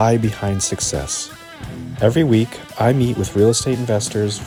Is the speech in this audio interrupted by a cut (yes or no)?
no